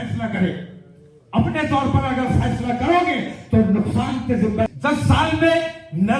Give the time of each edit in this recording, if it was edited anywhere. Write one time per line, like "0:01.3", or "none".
0:04.7